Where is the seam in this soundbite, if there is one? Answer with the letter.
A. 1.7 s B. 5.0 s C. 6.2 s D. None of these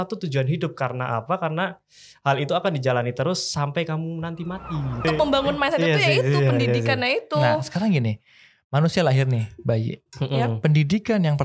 B